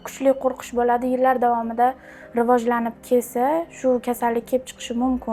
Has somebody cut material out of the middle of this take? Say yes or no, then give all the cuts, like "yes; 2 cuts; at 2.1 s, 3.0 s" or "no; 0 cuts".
no; 0 cuts